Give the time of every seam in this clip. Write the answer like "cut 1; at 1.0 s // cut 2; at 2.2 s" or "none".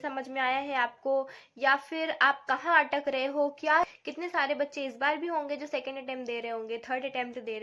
cut 1; at 3.8 s